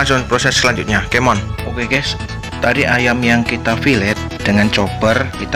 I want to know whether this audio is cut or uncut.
uncut